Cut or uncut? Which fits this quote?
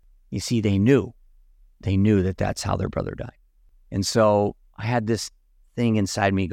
uncut